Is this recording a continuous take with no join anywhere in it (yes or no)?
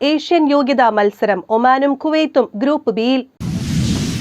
no